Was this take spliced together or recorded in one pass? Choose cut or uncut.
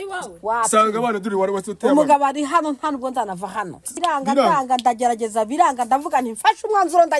cut